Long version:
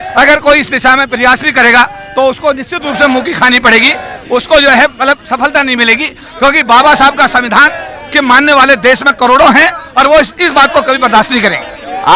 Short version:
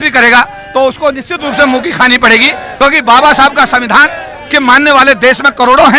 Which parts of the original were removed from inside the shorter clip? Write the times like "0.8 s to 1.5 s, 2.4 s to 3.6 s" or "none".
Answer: 4.0 s to 6.2 s